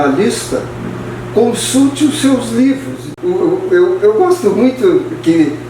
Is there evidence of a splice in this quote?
yes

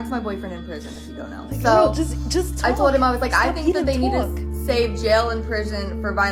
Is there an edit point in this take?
no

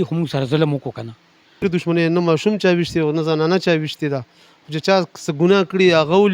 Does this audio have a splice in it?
yes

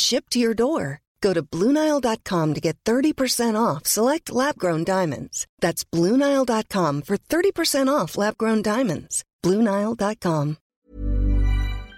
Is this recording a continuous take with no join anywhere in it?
no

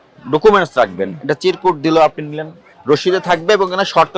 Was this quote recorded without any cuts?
no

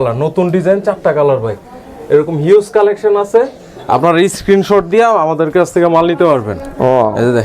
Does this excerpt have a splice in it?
no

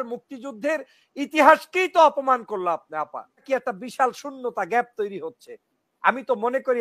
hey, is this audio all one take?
no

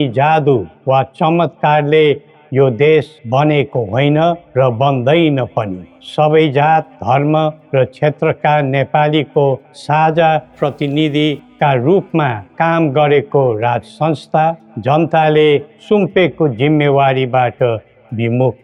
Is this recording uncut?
yes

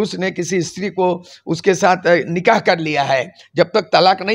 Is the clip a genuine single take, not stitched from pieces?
yes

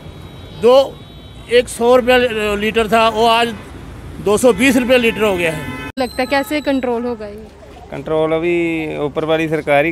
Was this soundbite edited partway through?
yes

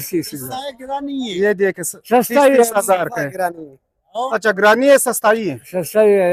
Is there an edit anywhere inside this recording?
no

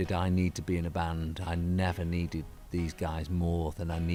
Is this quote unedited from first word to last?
yes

